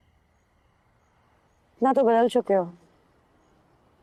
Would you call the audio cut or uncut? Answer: uncut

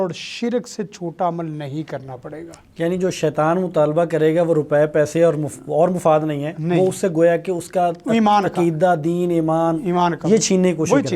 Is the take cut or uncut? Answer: uncut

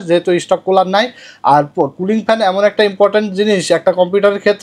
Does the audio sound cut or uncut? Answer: uncut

